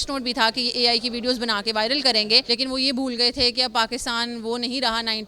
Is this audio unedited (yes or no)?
no